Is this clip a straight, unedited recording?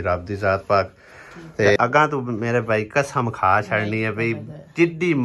no; 1 cut; at 1.8 s

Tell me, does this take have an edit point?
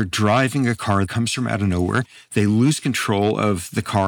yes; 1 cut; at 1.1 s

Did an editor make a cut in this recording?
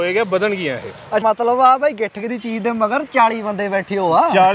yes; 1 cut; at 1.2 s

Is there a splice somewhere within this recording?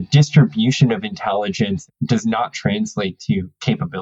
no; 0 cuts

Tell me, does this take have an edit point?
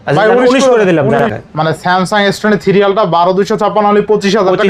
yes; 1 cut; at 1.3 s

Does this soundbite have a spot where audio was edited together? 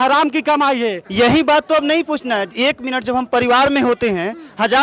yes; 1 cut; at 1.0 s

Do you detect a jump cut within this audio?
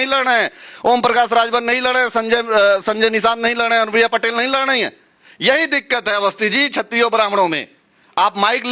no; 0 cuts

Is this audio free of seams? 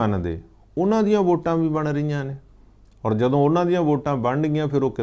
yes; 0 cuts

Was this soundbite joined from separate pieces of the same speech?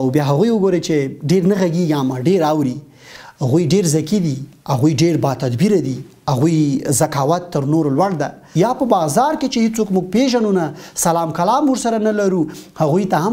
yes; 1 cut; at 8.4 s

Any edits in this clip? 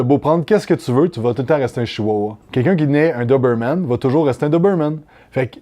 yes; 1 cut; at 2.4 s

